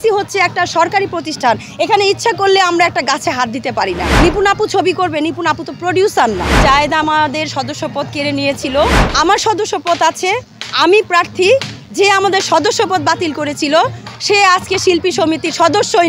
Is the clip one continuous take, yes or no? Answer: no